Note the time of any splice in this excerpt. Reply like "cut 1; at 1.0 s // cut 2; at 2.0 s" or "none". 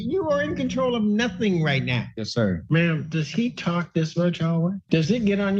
cut 1; at 2.4 s // cut 2; at 4.8 s